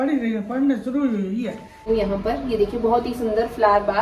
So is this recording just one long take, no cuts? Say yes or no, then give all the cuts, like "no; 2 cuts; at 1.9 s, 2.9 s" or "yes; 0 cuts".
no; 1 cut; at 1.8 s